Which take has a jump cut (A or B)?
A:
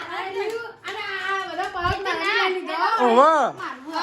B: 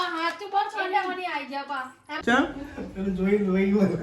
B